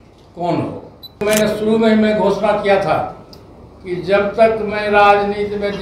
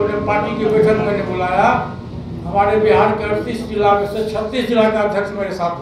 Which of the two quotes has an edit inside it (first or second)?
first